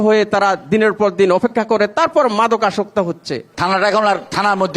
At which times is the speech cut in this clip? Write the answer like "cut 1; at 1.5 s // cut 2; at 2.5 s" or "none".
cut 1; at 3.5 s